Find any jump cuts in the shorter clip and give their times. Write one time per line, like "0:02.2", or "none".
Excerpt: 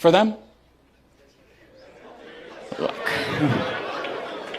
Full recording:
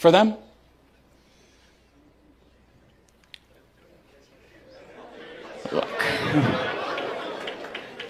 0:01.2